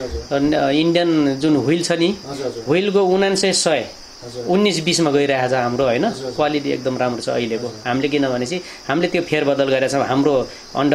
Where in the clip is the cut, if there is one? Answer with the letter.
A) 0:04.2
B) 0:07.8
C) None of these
C